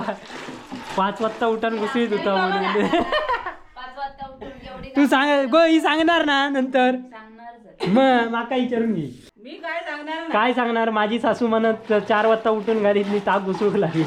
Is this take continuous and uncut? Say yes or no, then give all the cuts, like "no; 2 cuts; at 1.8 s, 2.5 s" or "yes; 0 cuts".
yes; 0 cuts